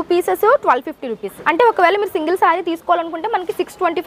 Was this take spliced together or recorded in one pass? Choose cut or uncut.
cut